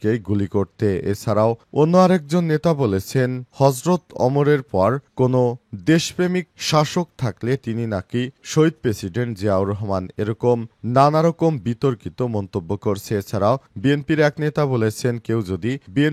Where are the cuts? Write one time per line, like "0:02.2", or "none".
none